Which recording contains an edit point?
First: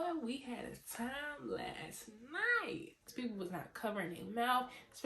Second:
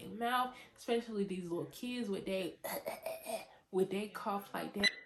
first; 1 cut; at 3.1 s

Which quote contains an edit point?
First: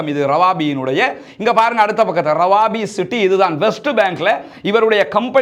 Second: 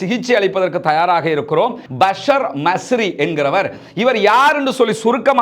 second; 1 cut; at 1.8 s

